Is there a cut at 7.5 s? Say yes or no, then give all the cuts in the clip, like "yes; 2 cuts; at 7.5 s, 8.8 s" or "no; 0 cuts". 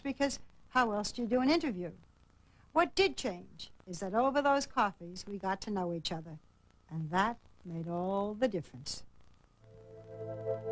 yes; 1 cut; at 7.5 s